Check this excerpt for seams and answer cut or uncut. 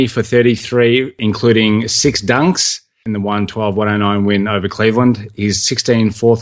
cut